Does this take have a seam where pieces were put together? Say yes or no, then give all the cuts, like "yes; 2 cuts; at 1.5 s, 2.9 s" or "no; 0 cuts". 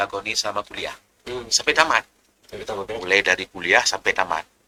no; 0 cuts